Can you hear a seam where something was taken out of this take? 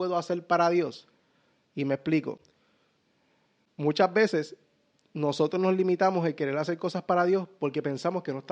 no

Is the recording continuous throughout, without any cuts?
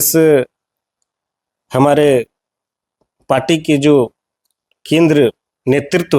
yes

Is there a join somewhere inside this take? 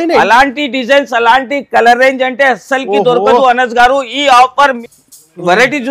yes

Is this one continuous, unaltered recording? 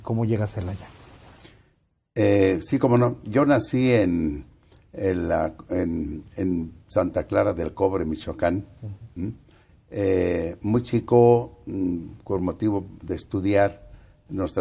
no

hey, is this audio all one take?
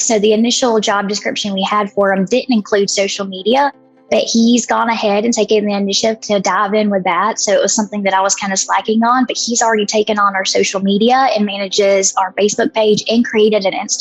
yes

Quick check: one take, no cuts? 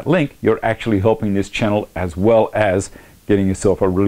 yes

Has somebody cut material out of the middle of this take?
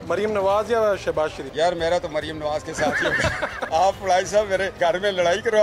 yes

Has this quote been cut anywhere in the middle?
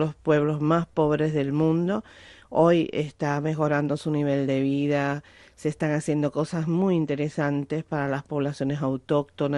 no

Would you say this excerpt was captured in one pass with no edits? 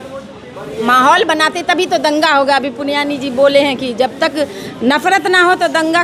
yes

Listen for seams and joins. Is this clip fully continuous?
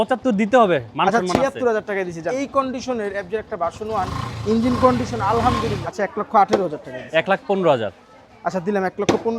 no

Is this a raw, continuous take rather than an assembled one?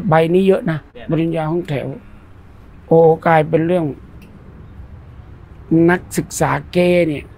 no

